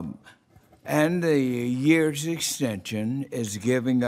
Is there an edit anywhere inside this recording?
yes; 1 cut; at 2.8 s

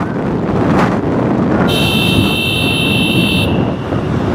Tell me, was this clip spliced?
no; 0 cuts

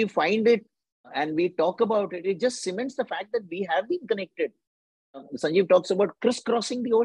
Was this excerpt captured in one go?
no; 1 cut; at 1.1 s

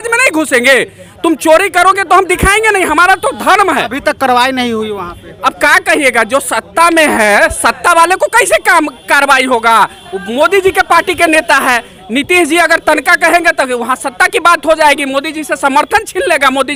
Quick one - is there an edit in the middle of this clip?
no; 0 cuts

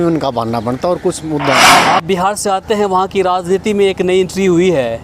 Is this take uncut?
no; 1 cut; at 1.6 s

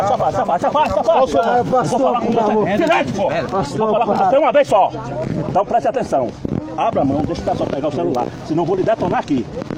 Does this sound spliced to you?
no; 0 cuts

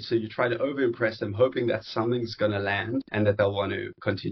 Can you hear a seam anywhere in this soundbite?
yes; 1 cut; at 3.1 s

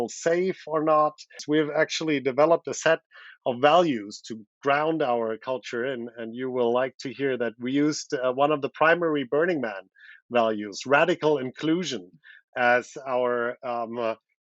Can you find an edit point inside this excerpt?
yes; 1 cut; at 1.4 s

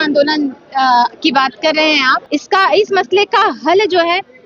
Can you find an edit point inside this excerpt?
yes; 1 cut; at 2.2 s

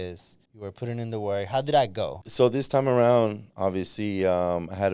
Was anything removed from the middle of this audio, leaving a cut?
yes; 1 cut; at 2.2 s

